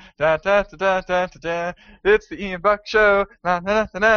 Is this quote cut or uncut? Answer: uncut